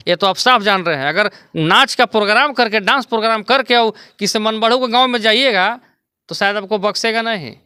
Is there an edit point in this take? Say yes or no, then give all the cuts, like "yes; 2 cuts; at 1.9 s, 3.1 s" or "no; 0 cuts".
no; 0 cuts